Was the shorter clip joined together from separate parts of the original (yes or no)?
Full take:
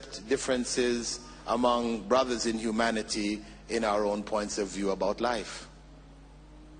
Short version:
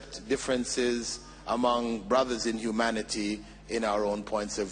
no